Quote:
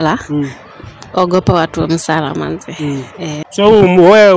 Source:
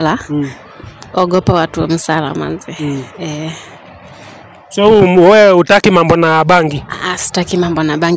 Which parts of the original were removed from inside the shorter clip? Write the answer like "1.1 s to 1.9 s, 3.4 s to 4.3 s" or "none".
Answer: 3.5 s to 4.6 s